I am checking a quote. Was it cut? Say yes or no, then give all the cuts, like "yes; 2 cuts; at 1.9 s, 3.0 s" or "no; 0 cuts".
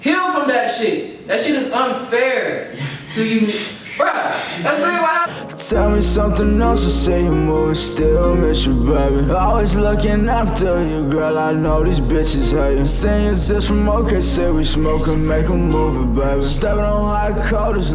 yes; 1 cut; at 5.3 s